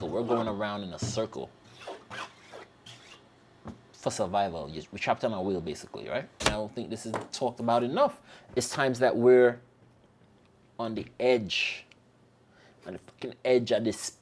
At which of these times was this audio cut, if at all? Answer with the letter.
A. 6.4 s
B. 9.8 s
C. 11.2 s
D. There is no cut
A